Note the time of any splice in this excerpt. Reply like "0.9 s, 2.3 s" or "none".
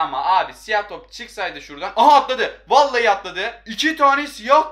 3.6 s